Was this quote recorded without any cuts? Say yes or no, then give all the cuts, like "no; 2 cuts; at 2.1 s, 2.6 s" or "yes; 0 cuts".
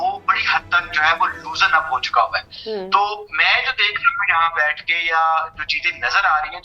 yes; 0 cuts